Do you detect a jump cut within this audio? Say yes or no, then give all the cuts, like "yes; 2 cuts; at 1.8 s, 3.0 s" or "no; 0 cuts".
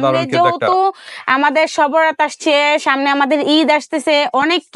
no; 0 cuts